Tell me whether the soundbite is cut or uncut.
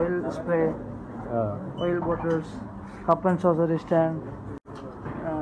uncut